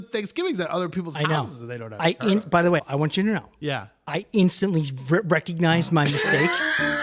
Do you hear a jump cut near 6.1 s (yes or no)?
no